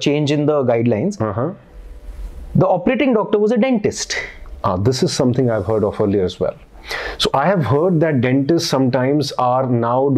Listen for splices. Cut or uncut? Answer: uncut